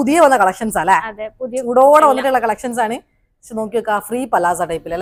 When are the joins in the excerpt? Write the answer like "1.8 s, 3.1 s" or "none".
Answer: none